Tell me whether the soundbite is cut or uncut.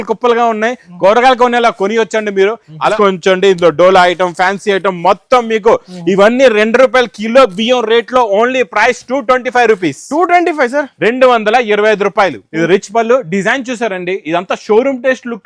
cut